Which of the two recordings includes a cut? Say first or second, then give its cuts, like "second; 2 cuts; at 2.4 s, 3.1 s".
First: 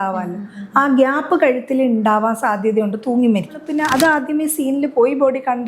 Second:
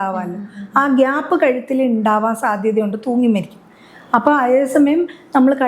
first; 1 cut; at 3.7 s